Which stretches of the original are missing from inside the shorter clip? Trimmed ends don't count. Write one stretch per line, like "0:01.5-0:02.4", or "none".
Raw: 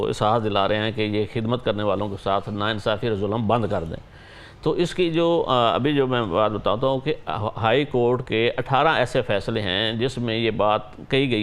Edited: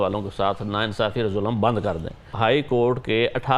0:04.1-0:07.5